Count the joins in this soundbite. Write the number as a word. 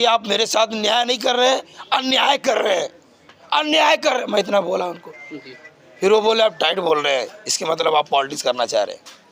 zero